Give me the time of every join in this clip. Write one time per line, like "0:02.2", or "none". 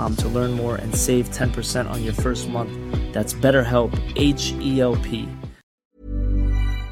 0:06.0